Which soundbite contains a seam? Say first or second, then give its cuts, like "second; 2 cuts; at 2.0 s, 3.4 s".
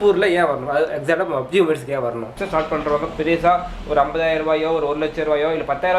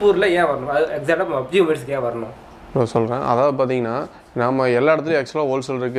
first; 1 cut; at 2.3 s